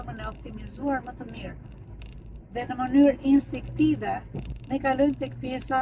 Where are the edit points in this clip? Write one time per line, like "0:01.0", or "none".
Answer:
none